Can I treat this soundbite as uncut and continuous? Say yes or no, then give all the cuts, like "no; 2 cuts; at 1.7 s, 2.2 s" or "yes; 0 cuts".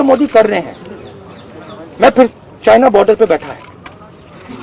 no; 1 cut; at 2.3 s